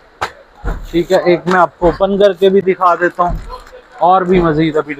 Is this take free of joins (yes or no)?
yes